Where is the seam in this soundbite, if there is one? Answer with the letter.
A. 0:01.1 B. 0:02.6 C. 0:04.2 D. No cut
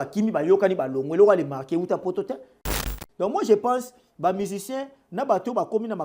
B